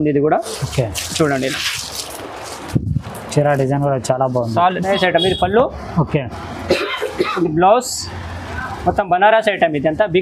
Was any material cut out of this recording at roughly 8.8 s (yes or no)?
no